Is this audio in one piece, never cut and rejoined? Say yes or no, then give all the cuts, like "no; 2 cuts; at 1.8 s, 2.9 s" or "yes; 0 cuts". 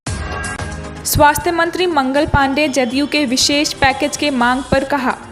yes; 0 cuts